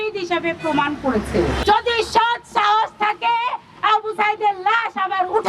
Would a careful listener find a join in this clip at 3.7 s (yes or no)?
no